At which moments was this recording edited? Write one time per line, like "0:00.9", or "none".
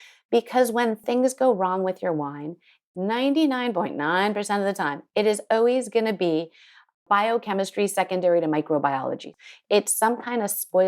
0:01.0
0:02.8
0:09.2